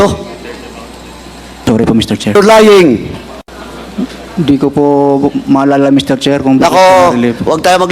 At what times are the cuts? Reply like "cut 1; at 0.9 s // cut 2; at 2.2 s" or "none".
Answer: cut 1; at 2.4 s